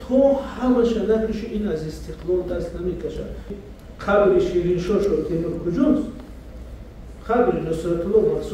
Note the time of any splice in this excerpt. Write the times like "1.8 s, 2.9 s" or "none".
3.6 s